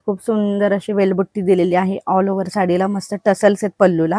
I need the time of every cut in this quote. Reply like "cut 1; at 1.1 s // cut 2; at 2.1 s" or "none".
none